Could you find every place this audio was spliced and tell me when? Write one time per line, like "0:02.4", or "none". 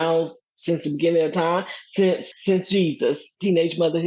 0:02.3